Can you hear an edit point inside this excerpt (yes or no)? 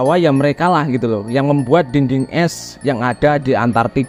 no